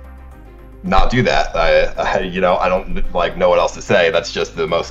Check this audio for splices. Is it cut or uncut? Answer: uncut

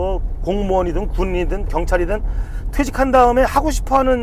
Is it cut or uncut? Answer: uncut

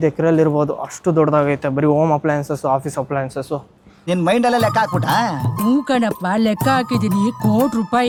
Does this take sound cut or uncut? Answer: uncut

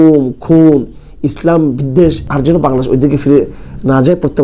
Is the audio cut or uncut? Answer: cut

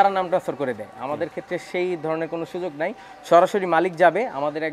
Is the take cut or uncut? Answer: uncut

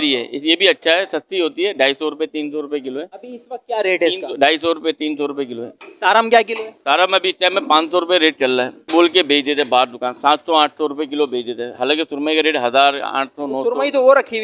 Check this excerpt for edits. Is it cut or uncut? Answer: uncut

